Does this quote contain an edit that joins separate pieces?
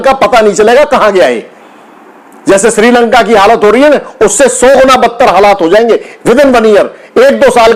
no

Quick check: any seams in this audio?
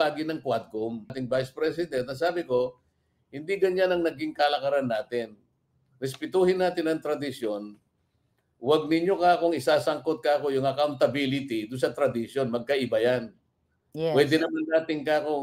yes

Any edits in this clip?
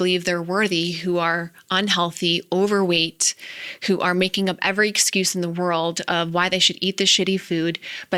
no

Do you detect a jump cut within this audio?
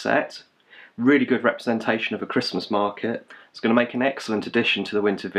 no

